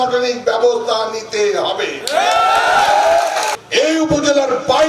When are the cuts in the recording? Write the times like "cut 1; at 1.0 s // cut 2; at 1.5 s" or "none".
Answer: cut 1; at 3.6 s